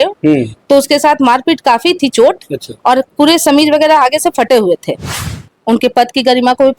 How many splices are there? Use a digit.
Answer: 1